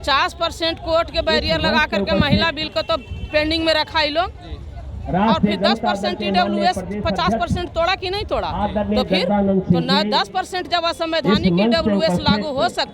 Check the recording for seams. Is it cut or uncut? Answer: uncut